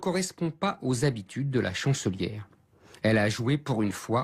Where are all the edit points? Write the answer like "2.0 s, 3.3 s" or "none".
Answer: 3.1 s